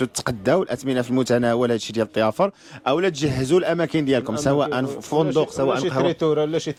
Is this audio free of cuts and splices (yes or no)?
yes